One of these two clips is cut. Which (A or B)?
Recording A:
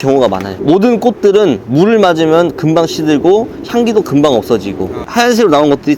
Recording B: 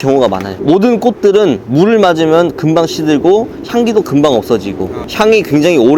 A